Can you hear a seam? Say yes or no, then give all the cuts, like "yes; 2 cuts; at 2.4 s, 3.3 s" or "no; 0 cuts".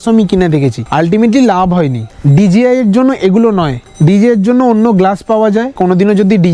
yes; 2 cuts; at 2.1 s, 5.7 s